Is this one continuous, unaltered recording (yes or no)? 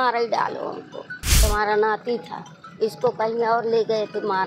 no